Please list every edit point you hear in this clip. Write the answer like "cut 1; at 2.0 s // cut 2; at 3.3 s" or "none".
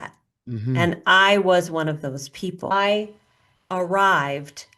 cut 1; at 2.7 s